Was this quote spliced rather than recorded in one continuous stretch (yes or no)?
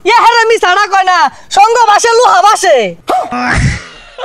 yes